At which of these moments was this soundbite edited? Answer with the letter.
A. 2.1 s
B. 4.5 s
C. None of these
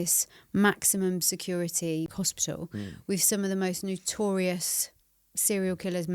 A